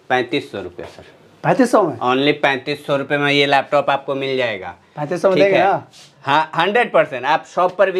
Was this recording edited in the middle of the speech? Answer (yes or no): no